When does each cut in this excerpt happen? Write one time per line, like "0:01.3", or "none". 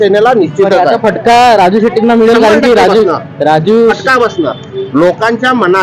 none